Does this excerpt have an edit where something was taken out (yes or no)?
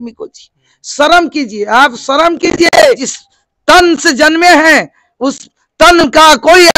yes